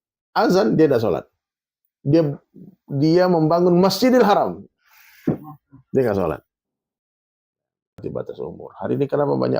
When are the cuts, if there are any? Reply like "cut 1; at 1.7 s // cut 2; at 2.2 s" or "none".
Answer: cut 1; at 8.0 s